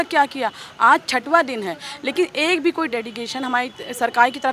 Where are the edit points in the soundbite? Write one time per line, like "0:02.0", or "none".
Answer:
none